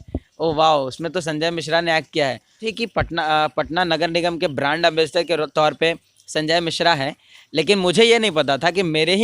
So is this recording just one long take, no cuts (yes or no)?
no